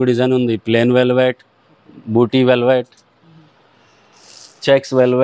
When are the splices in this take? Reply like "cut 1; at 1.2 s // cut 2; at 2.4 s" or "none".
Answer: none